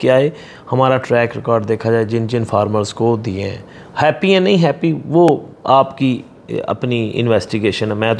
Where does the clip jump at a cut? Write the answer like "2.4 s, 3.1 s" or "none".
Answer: none